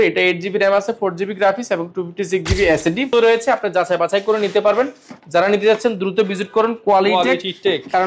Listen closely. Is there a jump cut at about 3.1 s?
yes; 1 cut; at 3.1 s

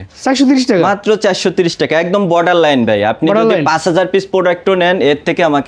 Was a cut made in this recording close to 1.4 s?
no; 0 cuts

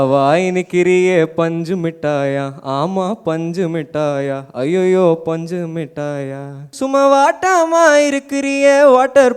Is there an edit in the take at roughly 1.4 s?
no; 1 cut; at 6.7 s

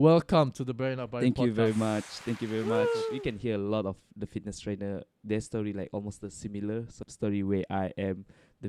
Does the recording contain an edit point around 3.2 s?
yes; 2 cuts; at 3.2 s, 7.0 s

